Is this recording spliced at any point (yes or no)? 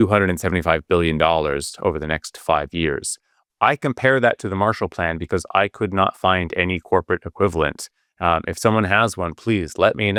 no